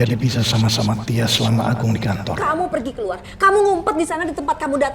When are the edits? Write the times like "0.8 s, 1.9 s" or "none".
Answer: 2.4 s